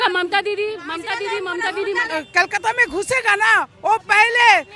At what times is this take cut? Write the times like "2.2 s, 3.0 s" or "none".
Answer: none